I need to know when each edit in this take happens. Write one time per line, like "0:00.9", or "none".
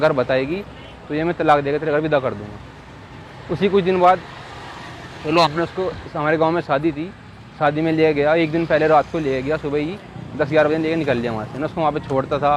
none